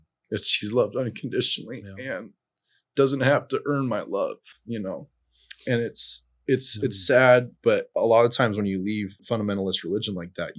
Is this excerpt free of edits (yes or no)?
no